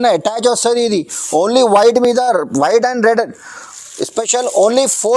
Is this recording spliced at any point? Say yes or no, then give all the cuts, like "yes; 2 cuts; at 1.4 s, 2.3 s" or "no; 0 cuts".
no; 0 cuts